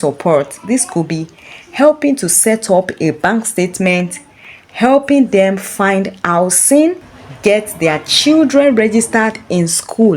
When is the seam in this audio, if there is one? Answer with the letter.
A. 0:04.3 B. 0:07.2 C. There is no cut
B